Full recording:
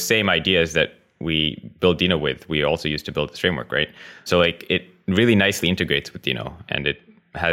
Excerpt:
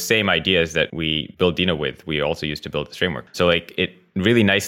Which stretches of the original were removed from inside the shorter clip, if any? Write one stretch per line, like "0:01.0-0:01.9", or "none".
0:01.1-0:01.5
0:03.6-0:04.1

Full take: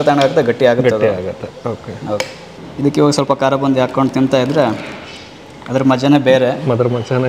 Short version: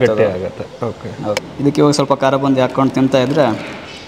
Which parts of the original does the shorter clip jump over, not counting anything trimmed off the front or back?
0:02.3-0:02.7

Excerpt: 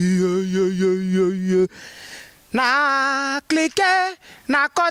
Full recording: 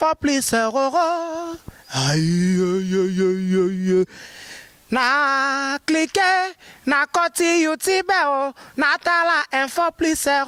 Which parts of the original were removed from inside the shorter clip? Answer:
none

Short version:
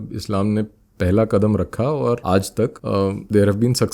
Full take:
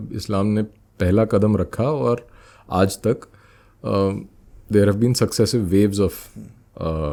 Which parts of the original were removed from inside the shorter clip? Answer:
0:02.7-0:04.1

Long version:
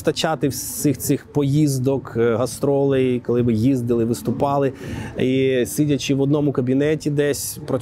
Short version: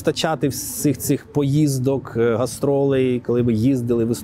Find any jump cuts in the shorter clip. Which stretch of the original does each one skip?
none

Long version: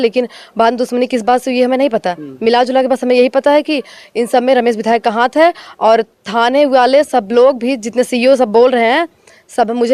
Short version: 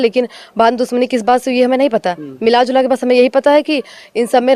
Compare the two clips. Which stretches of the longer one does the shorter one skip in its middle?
none

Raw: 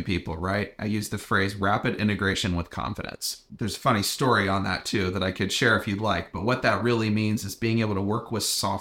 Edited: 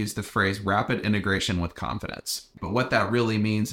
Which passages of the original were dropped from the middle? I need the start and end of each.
0:03.5-0:06.3

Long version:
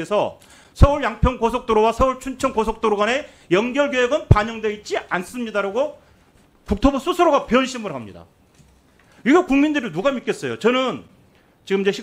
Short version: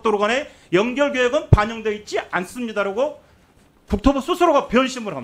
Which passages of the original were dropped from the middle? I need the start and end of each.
none

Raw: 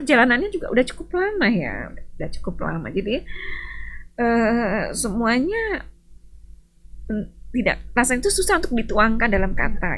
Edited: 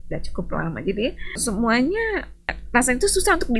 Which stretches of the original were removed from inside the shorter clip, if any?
0:03.5-0:05.0
0:06.2-0:07.8

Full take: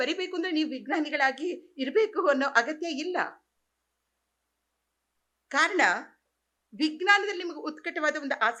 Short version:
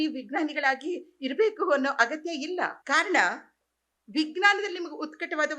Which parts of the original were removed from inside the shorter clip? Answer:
0:03.3-0:05.4

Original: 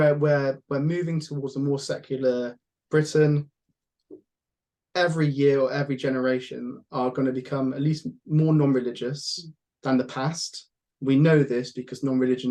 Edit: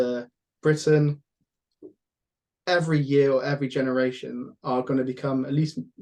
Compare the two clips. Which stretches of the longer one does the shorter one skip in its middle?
none

